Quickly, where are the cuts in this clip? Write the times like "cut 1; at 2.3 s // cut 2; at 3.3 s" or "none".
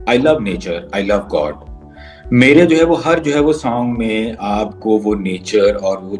none